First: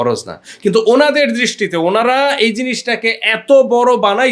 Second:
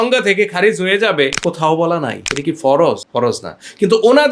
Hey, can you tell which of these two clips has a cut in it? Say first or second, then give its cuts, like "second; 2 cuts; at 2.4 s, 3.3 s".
second; 1 cut; at 2.2 s